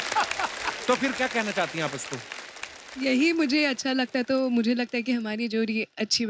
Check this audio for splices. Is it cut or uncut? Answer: uncut